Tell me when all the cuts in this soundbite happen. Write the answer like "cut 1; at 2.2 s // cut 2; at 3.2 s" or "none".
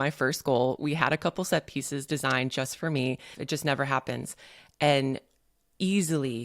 cut 1; at 3.3 s